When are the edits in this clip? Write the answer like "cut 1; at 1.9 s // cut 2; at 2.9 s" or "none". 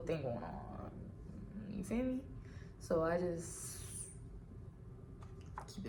none